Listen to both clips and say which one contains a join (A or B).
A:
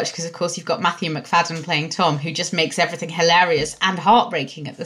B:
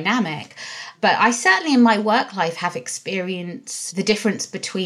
B